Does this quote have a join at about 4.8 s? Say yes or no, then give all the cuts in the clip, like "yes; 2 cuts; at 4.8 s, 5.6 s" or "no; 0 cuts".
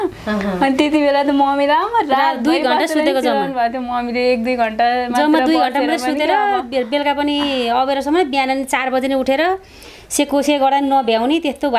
no; 0 cuts